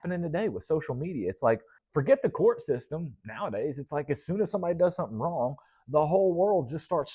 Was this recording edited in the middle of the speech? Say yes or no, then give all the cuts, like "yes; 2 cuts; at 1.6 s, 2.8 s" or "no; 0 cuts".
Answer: yes; 1 cut; at 1.8 s